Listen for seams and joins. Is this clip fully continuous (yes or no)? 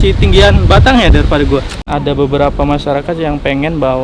no